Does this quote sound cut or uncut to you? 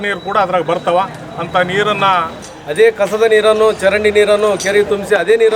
cut